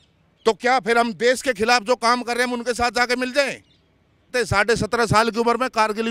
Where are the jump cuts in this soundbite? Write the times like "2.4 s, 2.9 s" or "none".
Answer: 4.3 s